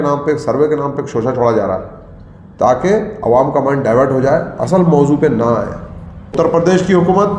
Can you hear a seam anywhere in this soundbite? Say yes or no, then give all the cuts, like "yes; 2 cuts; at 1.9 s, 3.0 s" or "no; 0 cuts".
yes; 1 cut; at 6.3 s